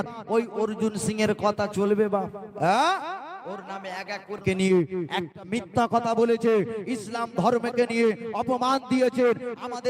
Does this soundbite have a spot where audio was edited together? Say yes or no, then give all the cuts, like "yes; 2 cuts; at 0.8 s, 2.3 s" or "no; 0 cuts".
yes; 2 cuts; at 4.4 s, 5.9 s